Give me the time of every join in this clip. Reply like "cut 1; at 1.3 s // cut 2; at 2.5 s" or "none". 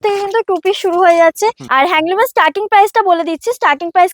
cut 1; at 1.6 s